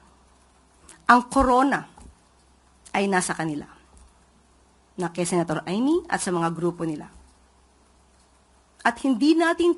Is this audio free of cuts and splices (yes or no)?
yes